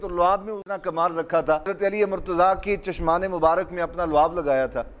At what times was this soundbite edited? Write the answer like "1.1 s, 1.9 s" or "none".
1.7 s